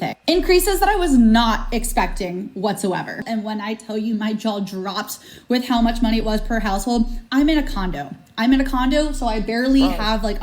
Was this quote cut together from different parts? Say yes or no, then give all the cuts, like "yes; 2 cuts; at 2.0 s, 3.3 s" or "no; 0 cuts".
yes; 1 cut; at 3.2 s